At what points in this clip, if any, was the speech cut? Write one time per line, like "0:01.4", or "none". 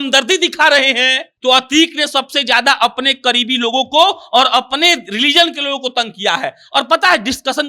0:01.3